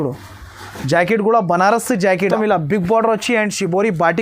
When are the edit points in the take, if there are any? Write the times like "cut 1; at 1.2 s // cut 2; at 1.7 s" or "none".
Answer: cut 1; at 2.3 s